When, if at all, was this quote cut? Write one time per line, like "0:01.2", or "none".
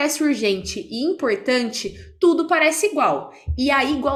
none